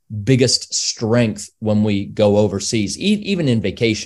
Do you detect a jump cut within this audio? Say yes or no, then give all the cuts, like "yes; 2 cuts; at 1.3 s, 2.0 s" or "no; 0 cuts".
no; 0 cuts